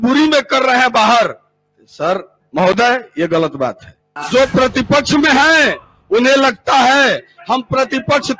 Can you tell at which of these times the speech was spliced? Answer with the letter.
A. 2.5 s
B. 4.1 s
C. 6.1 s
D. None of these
B